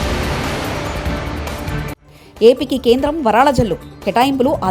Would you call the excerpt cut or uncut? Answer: cut